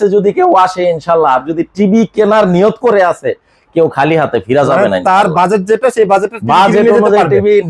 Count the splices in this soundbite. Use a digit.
0